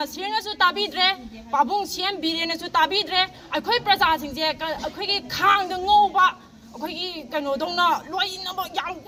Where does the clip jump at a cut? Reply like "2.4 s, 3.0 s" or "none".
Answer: none